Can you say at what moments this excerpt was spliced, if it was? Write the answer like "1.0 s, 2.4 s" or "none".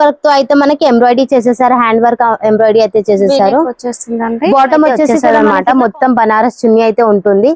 5.2 s